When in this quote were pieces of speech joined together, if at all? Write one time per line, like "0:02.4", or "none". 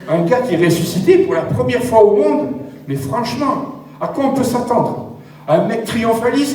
none